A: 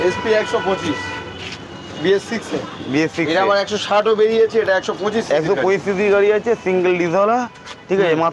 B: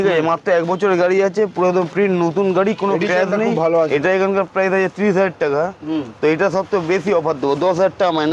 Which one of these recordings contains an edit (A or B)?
B